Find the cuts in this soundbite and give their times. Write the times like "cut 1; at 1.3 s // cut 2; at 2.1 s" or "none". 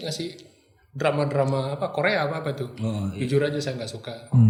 none